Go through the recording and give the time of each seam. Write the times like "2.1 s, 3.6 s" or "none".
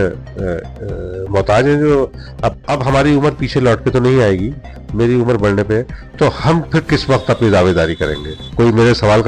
2.6 s